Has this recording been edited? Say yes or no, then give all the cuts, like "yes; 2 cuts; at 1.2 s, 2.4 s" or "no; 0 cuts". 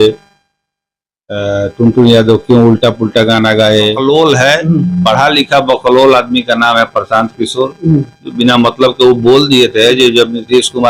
yes; 1 cut; at 4.0 s